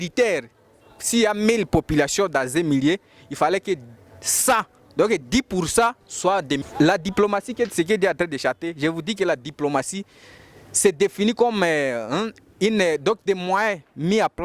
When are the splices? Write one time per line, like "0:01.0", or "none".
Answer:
0:06.6